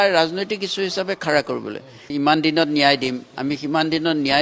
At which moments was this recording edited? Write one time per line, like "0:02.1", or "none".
0:02.1